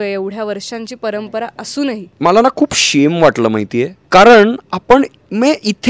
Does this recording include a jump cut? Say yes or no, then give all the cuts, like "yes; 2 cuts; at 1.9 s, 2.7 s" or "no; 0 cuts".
yes; 1 cut; at 2.1 s